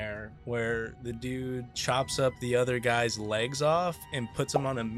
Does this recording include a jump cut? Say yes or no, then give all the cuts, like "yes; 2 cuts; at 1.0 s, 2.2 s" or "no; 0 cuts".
yes; 1 cut; at 1.7 s